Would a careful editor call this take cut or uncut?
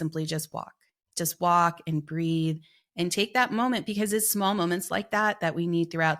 uncut